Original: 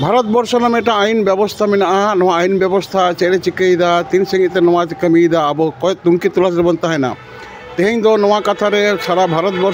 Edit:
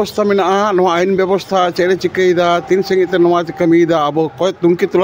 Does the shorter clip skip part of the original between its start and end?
no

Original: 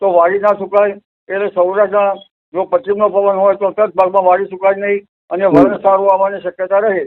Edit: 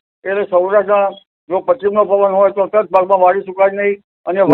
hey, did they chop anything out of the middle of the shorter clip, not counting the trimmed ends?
no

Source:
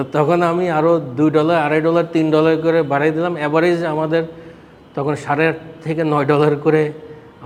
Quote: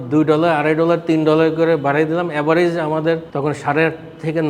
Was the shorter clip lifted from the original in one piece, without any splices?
no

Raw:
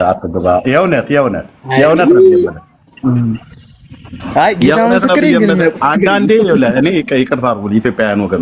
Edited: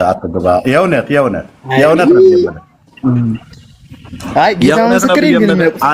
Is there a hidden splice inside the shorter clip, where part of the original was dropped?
no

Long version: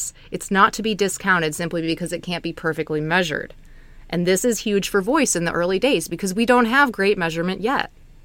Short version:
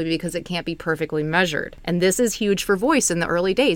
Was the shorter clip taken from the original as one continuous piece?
no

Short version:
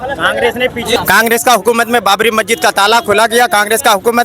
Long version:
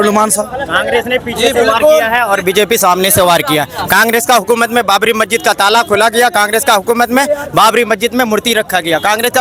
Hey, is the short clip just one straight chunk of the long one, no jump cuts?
no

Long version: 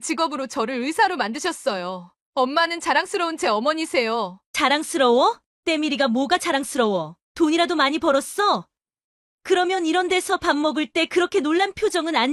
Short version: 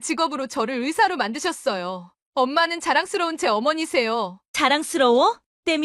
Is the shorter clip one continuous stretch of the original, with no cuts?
yes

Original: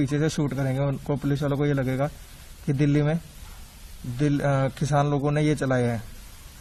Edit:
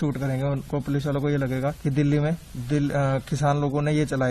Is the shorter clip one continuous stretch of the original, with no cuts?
no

